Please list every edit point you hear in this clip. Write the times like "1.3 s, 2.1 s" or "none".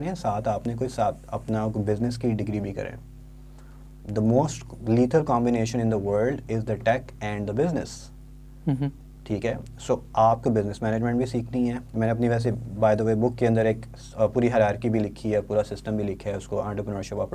none